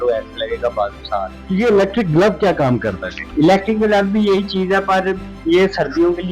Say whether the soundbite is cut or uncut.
cut